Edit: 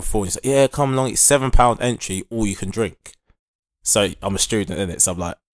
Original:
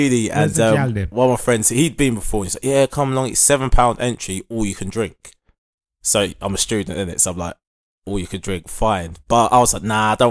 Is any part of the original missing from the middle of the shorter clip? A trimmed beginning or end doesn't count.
no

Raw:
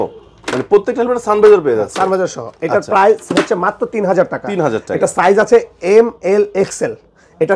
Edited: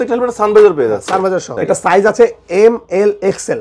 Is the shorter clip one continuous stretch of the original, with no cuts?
no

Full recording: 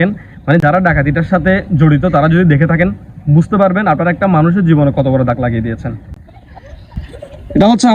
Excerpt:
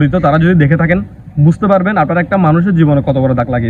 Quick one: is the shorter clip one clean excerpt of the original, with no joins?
yes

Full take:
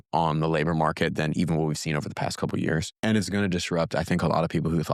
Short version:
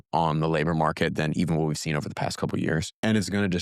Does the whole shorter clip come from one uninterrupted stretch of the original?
yes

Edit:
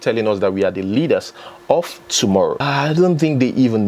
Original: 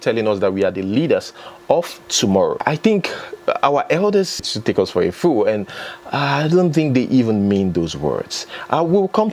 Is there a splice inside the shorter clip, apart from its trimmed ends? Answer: yes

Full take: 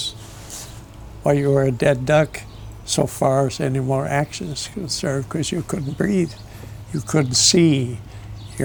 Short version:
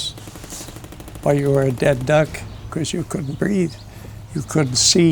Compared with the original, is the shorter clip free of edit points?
no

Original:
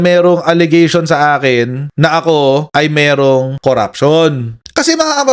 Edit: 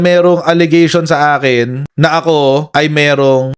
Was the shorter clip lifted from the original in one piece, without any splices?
yes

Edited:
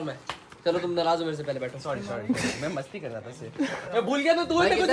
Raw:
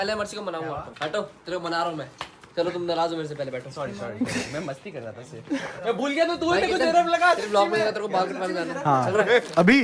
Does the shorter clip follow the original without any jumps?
yes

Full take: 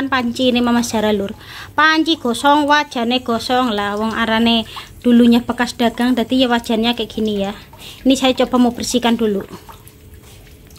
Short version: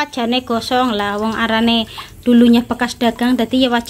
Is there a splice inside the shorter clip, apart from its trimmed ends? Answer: no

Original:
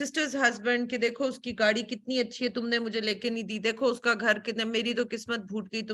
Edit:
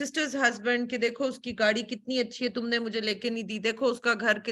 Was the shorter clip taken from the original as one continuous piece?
yes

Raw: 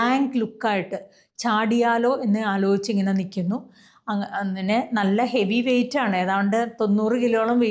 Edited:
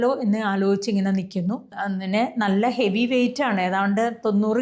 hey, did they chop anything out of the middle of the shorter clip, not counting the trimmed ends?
yes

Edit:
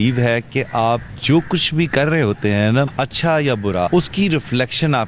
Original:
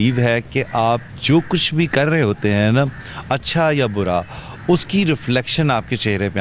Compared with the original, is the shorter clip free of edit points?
no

